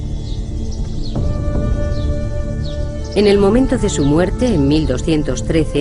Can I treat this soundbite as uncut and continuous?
yes; 0 cuts

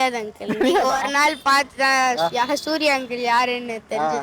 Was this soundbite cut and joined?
no; 0 cuts

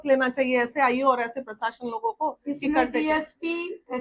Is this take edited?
no; 0 cuts

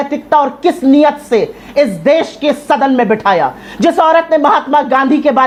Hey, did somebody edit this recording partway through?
no; 0 cuts

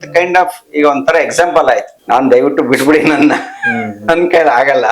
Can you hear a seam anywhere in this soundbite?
yes; 1 cut; at 1.9 s

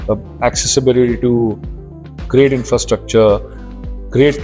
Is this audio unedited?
yes; 0 cuts

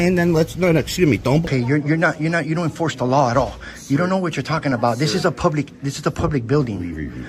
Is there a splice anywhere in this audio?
yes; 1 cut; at 1.4 s

